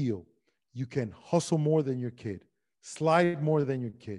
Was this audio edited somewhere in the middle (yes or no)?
no